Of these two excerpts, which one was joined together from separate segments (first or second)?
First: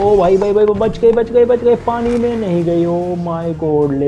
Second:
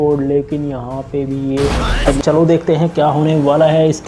second